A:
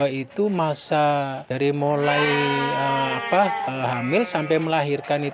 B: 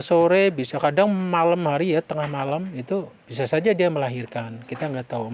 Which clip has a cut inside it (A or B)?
A